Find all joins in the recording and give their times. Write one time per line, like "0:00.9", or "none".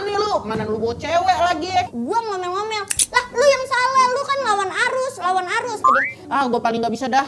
0:01.9
0:05.8